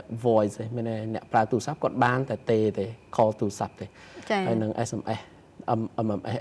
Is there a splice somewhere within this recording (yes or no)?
no